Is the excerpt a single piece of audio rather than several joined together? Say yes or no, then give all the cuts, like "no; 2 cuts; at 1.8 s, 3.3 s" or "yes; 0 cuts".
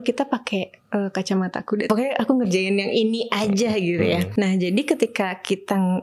no; 2 cuts; at 1.9 s, 4.3 s